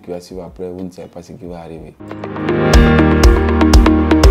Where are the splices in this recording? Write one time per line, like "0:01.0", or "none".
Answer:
0:01.9